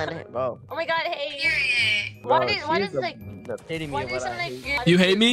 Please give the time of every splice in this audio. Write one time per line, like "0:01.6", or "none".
none